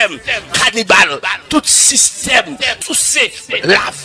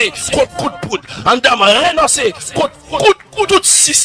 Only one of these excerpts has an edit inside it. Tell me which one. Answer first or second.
first